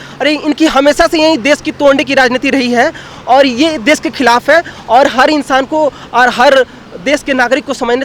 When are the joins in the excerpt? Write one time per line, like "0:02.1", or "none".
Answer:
none

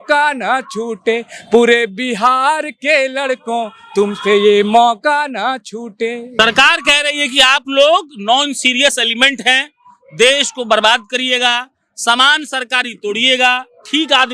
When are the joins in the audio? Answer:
0:06.3

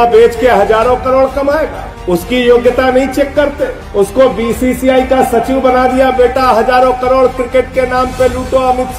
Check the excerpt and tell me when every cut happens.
none

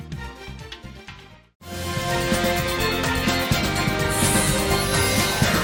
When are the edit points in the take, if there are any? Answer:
none

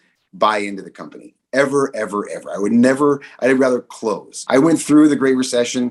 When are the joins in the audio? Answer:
0:04.3

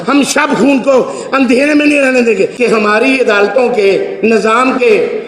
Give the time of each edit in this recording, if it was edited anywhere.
0:02.5

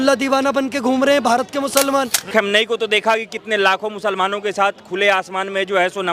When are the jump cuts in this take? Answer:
0:02.3

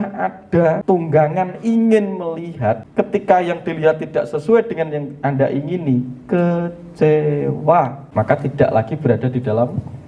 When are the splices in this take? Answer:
0:00.8
0:02.9
0:08.0

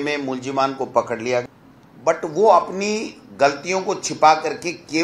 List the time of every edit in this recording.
0:01.4

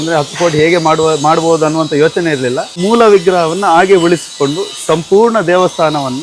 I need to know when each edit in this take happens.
0:02.7

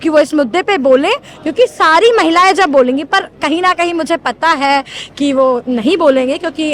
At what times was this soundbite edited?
none

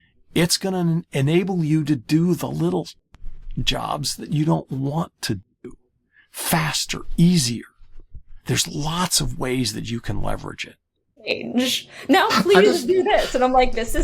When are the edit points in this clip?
0:11.3

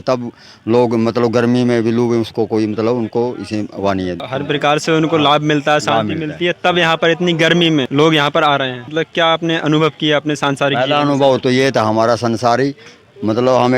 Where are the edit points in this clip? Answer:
0:04.2
0:07.9
0:08.9

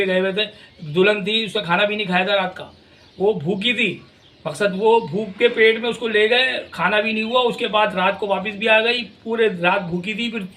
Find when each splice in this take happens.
none

